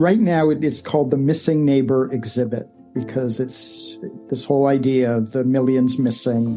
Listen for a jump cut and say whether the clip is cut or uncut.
uncut